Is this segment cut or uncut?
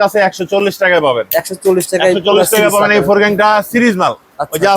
uncut